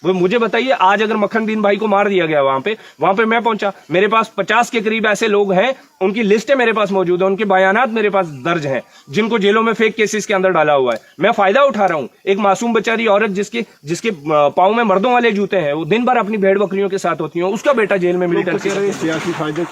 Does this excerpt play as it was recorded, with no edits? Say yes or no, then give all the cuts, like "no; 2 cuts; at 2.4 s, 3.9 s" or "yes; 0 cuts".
yes; 0 cuts